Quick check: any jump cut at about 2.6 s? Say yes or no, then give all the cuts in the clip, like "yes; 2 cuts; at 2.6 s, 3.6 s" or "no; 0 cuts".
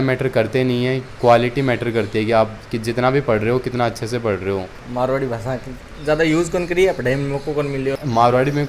no; 3 cuts; at 1.1 s, 4.8 s, 8.0 s